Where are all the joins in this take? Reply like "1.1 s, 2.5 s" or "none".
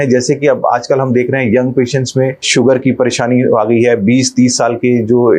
2.5 s

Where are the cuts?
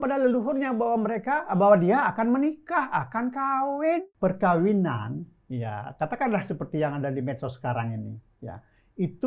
4.1 s

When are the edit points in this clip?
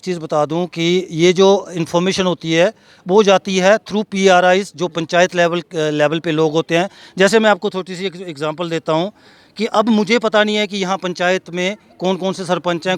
none

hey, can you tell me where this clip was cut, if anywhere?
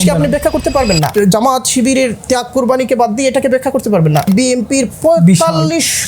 1.1 s, 4.3 s

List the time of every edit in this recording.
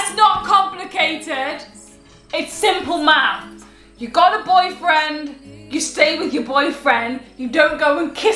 none

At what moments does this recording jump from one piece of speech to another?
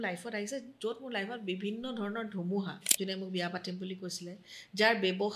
2.8 s

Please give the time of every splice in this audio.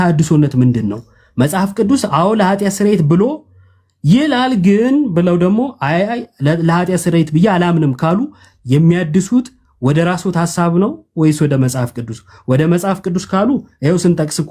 none

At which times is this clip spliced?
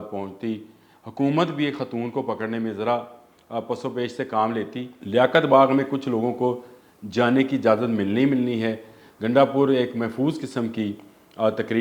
4.9 s

